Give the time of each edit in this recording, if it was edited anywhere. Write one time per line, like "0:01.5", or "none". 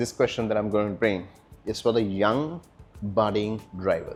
none